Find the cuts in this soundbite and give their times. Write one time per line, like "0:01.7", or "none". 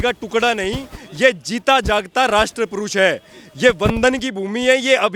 none